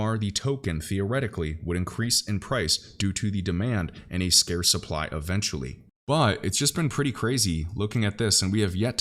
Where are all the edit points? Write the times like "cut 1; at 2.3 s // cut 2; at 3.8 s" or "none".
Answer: none